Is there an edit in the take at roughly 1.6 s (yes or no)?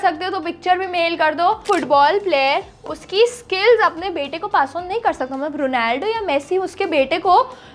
yes